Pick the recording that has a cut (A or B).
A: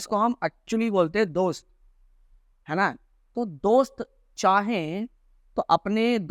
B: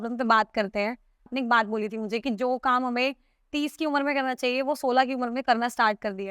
B